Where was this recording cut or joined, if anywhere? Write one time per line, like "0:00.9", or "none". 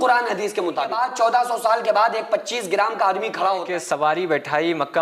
0:00.9
0:03.6

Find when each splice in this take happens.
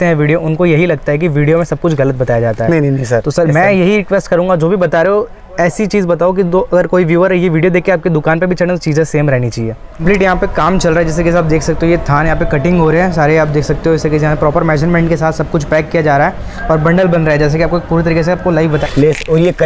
0:10.0
0:18.8

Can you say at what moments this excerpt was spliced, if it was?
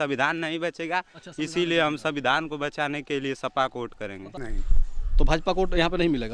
0:04.4

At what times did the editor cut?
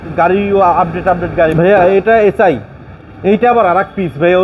0:01.5
0:02.9

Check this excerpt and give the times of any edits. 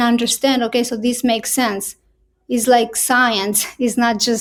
none

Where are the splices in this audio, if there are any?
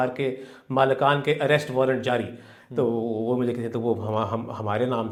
none

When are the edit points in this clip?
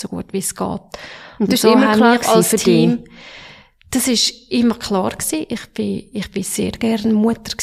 none

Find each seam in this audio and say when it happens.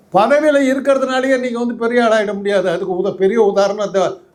none

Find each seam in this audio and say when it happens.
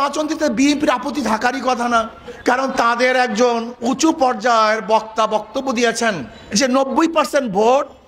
0:02.2
0:06.3

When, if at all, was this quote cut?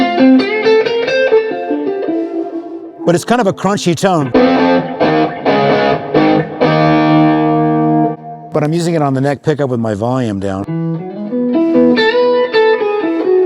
0:02.9
0:08.2

